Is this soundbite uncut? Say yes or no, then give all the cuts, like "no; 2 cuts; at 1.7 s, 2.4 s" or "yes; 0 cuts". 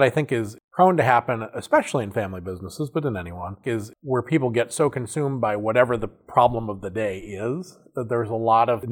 no; 1 cut; at 3.5 s